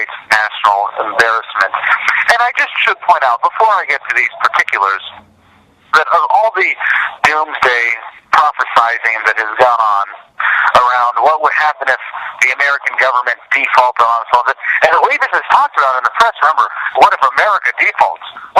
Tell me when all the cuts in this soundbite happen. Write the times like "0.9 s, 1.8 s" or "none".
3.4 s